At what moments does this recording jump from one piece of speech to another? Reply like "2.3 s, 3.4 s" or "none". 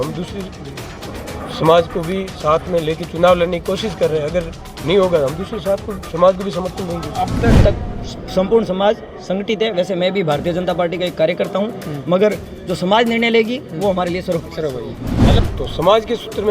7.6 s, 15.2 s